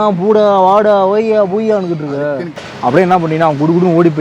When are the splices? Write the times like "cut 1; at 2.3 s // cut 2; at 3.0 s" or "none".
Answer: cut 1; at 2.7 s